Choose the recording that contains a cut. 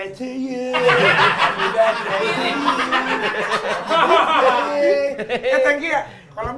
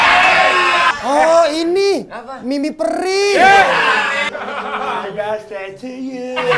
second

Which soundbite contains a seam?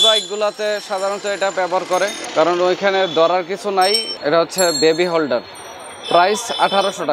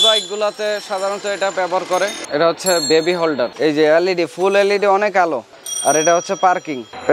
second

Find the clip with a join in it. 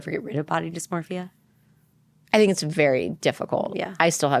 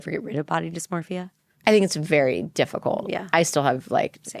second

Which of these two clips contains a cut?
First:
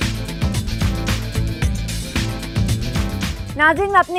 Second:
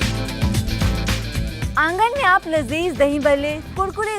second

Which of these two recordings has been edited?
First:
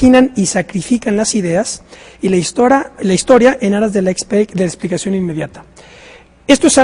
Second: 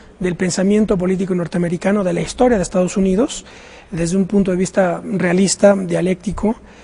first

